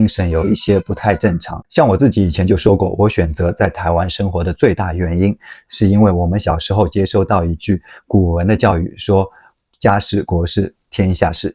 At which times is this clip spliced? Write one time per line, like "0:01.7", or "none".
none